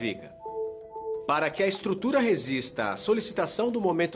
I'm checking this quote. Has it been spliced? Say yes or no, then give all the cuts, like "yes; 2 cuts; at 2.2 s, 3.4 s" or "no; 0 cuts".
no; 0 cuts